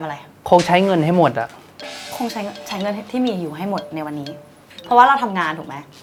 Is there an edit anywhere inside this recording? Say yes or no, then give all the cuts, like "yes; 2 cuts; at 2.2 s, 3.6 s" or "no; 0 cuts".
no; 0 cuts